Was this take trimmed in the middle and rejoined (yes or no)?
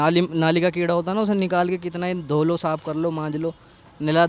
no